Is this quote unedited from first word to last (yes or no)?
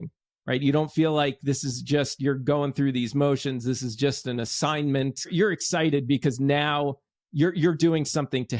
no